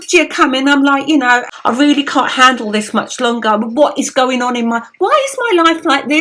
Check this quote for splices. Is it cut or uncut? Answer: cut